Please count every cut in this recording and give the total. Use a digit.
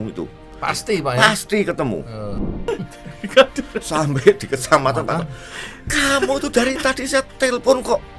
1